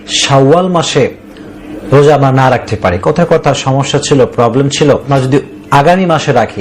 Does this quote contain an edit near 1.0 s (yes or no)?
no